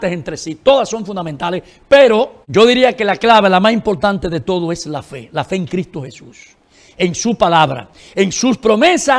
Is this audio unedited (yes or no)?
no